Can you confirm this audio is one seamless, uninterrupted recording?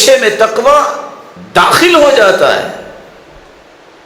yes; 0 cuts

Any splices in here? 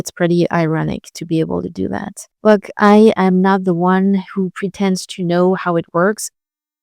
yes; 1 cut; at 2.2 s

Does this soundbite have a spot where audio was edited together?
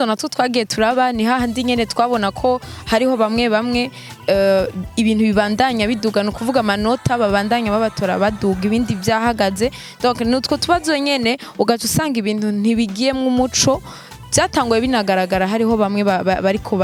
no; 0 cuts

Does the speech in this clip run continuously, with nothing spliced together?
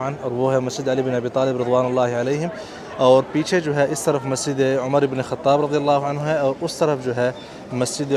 yes; 0 cuts

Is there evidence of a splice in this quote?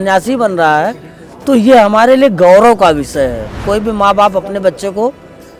yes; 1 cut; at 3.6 s

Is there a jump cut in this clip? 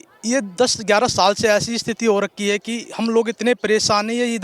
no; 0 cuts

